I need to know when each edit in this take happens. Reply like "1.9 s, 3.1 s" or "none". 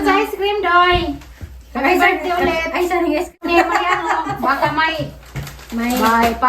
3.4 s